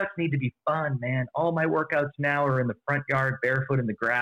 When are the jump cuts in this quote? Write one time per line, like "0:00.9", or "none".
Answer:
none